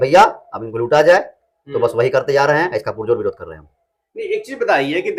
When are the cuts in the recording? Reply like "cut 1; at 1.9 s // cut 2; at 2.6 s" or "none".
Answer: none